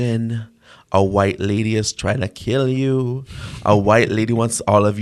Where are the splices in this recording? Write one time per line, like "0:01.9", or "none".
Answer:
none